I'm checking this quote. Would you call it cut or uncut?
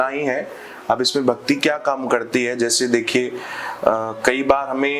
uncut